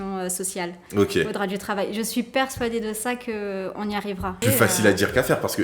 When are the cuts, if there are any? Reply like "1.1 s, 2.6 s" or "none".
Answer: 4.4 s